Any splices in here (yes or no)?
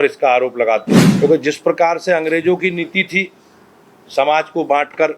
yes